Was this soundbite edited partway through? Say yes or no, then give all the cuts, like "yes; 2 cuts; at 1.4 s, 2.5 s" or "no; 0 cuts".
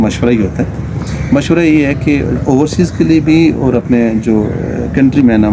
no; 0 cuts